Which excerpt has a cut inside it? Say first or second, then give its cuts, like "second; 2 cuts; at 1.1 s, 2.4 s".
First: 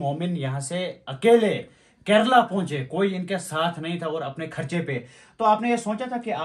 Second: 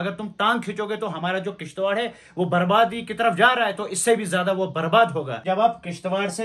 second; 1 cut; at 5.3 s